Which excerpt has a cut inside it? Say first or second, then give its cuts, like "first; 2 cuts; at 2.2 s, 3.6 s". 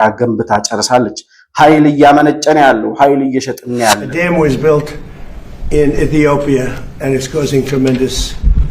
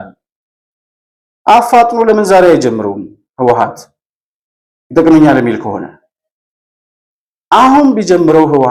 first; 1 cut; at 4.1 s